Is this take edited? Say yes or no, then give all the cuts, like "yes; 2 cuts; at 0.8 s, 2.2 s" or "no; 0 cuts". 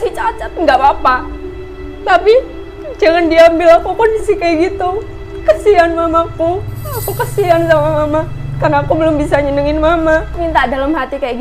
yes; 1 cut; at 10.4 s